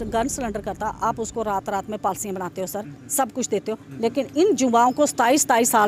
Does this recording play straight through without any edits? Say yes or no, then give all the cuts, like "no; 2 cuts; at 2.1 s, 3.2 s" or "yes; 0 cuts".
yes; 0 cuts